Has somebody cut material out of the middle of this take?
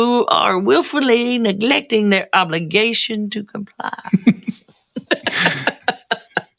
yes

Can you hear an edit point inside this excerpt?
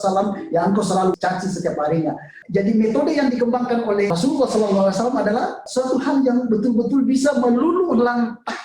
yes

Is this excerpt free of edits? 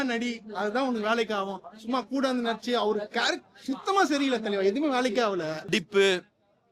no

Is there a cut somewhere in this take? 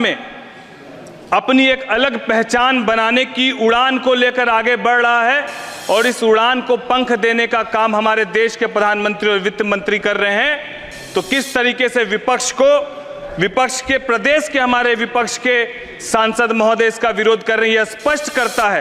no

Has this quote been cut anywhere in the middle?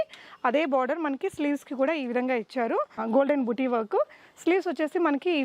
yes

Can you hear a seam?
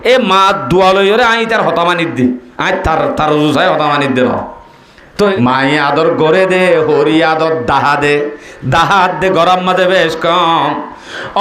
yes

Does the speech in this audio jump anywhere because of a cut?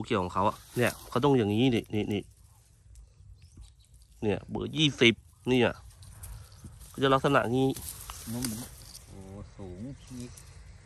no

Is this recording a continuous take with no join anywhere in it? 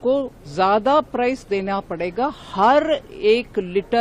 yes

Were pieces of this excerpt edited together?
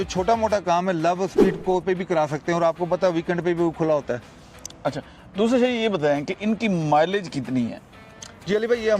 no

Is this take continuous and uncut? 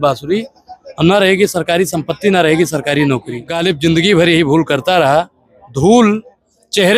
no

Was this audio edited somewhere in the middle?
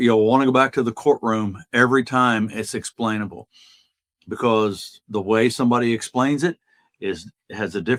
no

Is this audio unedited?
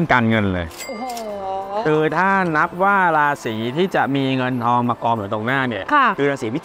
yes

